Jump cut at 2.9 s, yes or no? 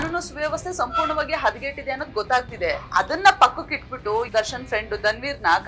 yes